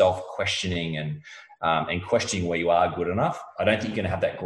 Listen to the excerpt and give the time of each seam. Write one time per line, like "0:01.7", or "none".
none